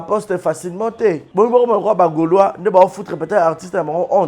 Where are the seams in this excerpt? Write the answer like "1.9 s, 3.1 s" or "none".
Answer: 1.2 s